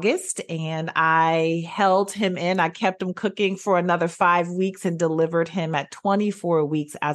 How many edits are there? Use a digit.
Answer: 0